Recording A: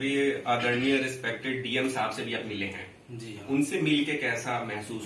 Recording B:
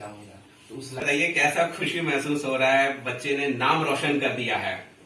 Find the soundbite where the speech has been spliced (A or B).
B